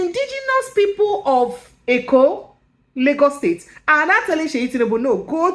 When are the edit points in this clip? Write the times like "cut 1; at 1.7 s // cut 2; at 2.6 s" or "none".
cut 1; at 1.7 s